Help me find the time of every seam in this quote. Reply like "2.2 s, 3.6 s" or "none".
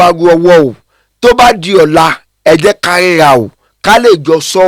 none